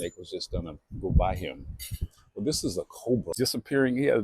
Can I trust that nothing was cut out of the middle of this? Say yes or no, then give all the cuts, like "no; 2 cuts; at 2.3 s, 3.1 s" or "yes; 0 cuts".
no; 1 cut; at 3.3 s